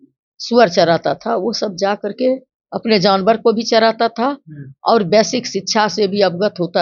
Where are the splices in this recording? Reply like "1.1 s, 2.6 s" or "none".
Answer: none